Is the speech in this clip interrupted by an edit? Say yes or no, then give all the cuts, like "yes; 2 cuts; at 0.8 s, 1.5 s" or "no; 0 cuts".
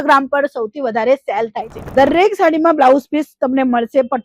yes; 1 cut; at 1.8 s